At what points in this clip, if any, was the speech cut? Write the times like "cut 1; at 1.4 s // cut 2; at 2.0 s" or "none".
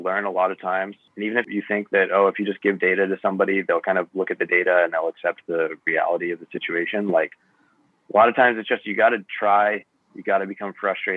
cut 1; at 1.5 s